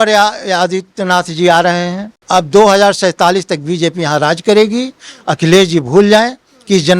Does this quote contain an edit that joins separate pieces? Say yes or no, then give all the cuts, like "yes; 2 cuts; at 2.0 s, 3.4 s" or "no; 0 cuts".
yes; 1 cut; at 2.2 s